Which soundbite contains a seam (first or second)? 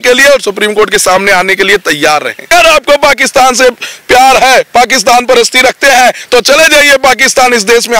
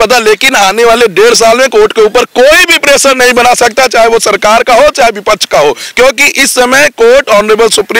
first